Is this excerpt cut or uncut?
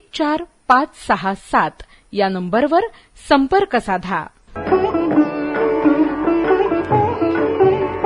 cut